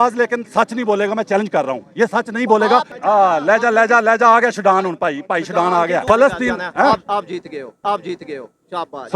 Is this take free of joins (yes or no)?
no